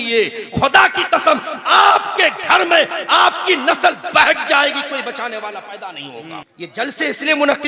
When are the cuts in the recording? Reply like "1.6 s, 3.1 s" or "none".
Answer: 6.5 s